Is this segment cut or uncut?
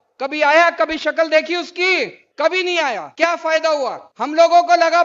cut